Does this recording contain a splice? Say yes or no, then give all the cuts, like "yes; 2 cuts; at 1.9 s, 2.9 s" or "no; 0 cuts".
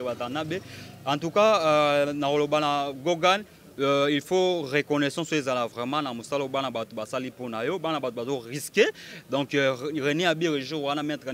no; 0 cuts